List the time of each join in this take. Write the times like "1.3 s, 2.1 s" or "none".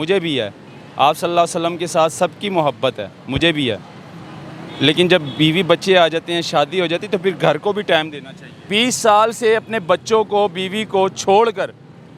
8.6 s